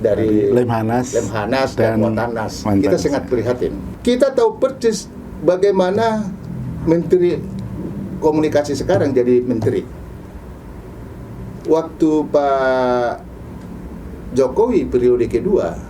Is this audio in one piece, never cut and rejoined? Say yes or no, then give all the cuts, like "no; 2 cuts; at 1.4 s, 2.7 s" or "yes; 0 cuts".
no; 1 cut; at 3.9 s